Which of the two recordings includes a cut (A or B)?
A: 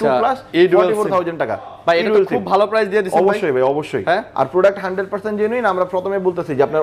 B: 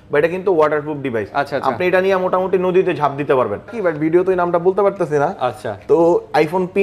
B